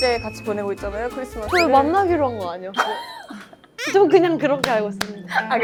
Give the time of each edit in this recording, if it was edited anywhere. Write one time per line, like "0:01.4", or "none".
none